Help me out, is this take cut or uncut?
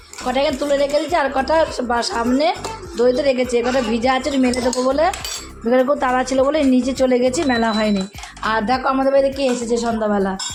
uncut